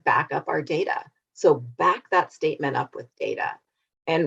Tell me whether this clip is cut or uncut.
uncut